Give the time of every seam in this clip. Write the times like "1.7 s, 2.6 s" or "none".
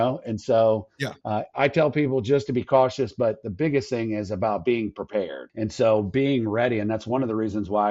5.4 s